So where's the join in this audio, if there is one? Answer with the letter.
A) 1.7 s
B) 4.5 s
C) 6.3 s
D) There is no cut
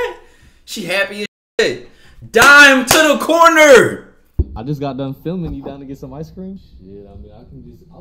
B